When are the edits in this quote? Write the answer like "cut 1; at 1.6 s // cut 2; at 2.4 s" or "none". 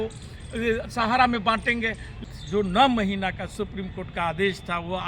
cut 1; at 2.2 s